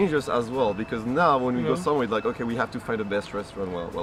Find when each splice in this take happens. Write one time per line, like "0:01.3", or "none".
none

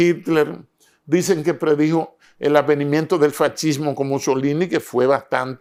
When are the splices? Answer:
none

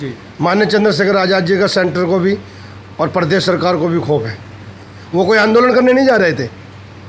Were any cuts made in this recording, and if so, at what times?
0:05.0

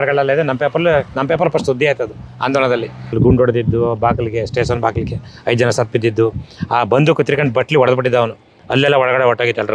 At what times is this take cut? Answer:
0:03.1

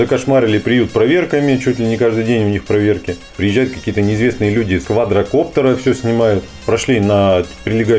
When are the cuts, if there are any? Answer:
0:03.4
0:04.8
0:06.5

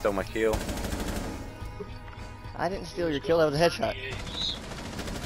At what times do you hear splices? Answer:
none

